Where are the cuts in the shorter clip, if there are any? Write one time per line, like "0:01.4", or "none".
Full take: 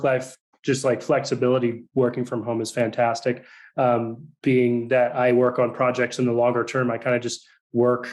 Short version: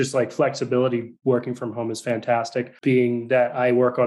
0:02.7